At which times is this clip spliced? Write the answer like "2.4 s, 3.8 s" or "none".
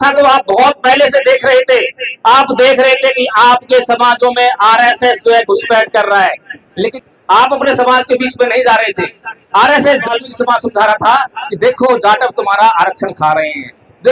6.9 s, 10.1 s